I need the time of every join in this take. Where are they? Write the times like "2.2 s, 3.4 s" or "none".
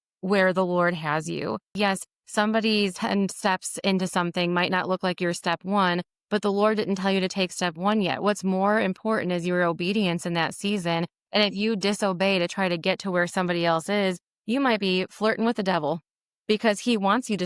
1.7 s, 3.0 s

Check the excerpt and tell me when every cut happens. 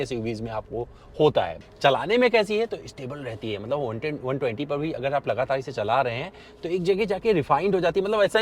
1.5 s

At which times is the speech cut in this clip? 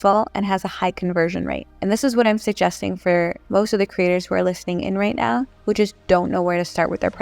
1.7 s, 3.4 s, 5.5 s

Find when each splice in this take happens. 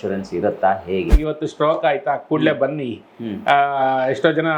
1.1 s

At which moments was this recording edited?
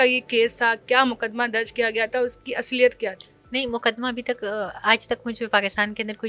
none

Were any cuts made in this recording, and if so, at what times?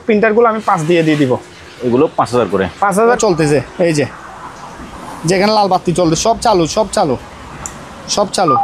3.2 s

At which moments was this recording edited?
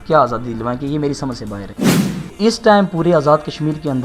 1.6 s, 2.3 s

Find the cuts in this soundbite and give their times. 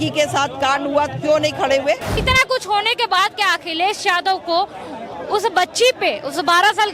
2.2 s

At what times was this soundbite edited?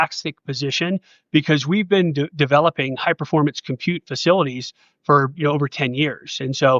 none

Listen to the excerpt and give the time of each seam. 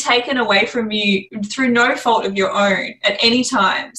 1.4 s

